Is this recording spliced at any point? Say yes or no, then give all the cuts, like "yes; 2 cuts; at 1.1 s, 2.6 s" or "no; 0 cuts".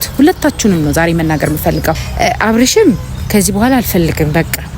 yes; 1 cut; at 2.0 s